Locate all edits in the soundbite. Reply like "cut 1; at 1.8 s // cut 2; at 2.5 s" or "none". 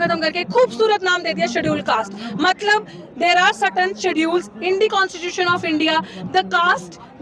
none